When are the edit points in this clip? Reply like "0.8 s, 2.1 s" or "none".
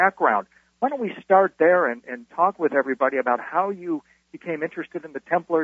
none